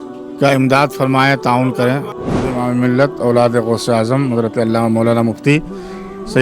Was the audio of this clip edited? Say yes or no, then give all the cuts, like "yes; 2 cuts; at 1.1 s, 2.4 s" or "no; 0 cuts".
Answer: yes; 1 cut; at 2.1 s